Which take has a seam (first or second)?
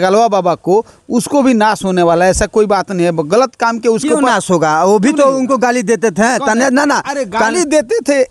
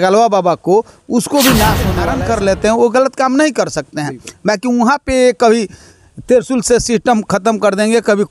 second